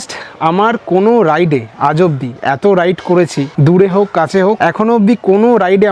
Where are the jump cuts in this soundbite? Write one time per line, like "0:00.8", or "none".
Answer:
none

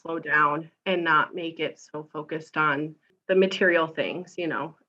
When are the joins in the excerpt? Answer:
0:03.1

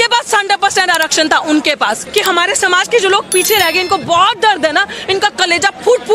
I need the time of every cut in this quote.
0:02.0

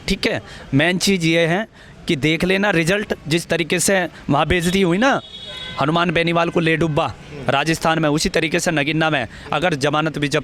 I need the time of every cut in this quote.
none

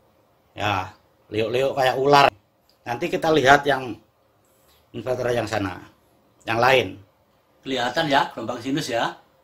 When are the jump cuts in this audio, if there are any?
0:02.3

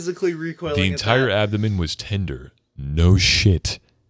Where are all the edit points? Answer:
none

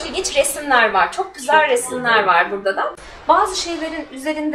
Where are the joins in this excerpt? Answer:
0:03.0

